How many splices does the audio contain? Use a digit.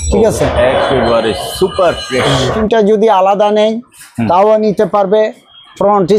1